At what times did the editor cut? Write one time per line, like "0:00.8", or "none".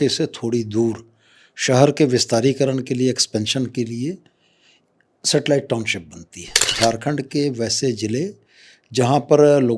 0:06.7